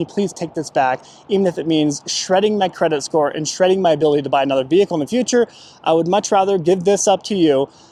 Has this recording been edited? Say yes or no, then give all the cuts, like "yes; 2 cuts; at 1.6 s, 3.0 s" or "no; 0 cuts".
no; 0 cuts